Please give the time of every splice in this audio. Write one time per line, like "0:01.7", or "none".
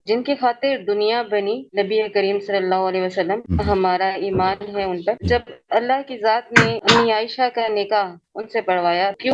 none